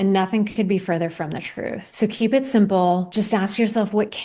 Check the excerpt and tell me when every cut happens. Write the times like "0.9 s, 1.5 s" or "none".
1.8 s, 3.1 s